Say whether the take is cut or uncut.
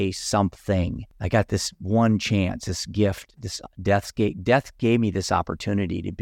cut